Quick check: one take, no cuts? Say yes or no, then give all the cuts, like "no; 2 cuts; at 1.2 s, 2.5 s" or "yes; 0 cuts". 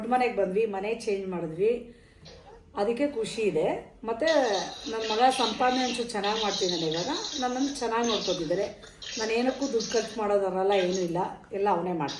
yes; 0 cuts